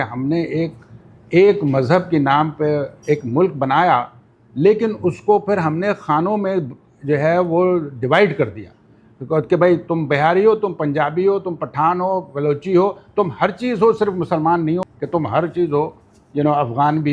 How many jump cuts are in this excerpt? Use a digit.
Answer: 1